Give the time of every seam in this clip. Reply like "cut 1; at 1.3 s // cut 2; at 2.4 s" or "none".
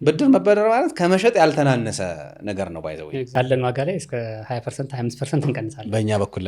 cut 1; at 3.3 s